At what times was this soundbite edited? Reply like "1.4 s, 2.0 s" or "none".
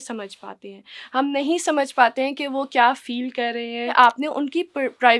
3.9 s

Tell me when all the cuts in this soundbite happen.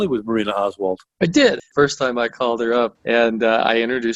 1.7 s, 3.0 s

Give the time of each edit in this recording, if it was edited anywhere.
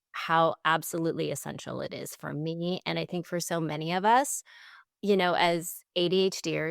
none

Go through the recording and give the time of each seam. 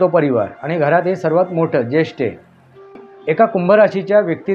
3.1 s

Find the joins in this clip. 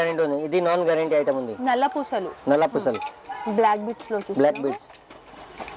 none

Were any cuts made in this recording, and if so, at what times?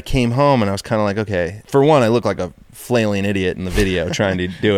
1.6 s

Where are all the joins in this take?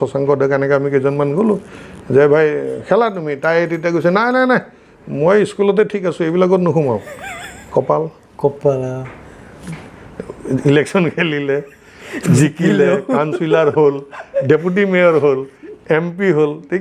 none

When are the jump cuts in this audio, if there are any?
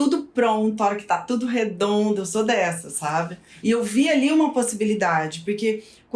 3.5 s

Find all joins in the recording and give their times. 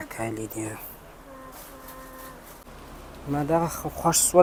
none

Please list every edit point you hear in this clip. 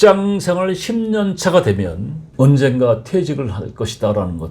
none

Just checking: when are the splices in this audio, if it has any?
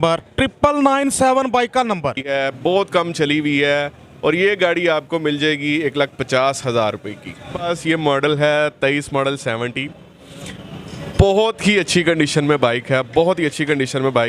2.4 s, 7.7 s

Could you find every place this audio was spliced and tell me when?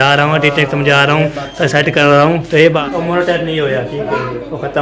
2.8 s

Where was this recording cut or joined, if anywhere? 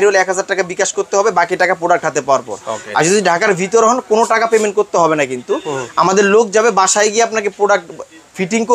none

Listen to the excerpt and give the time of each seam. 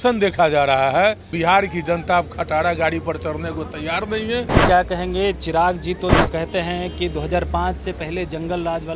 1.3 s, 4.5 s

